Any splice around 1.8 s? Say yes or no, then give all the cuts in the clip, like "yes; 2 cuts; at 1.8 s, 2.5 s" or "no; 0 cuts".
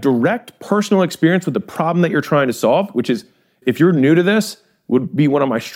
no; 1 cut; at 3.6 s